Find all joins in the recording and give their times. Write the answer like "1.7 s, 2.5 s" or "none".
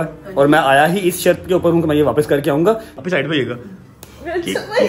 3.0 s